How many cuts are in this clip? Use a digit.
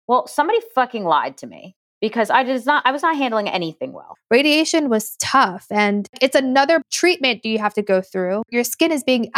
2